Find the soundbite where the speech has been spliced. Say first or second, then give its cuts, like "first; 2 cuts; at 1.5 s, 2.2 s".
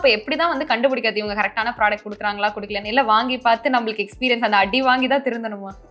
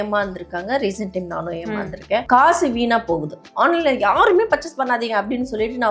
second; 2 cuts; at 2.2 s, 3.4 s